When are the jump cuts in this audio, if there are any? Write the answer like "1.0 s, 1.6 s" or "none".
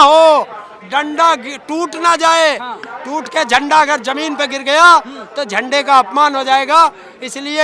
none